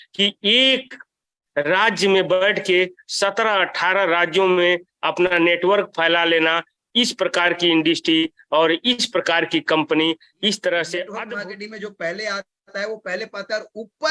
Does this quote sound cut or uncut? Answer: cut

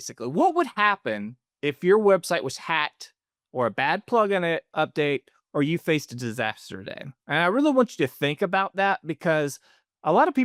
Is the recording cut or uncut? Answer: uncut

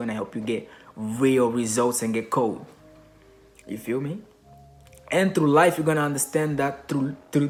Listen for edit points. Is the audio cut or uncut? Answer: uncut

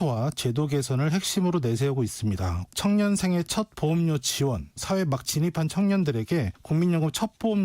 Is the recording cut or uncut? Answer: cut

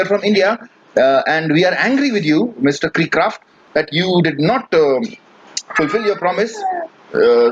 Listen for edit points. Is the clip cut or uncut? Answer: uncut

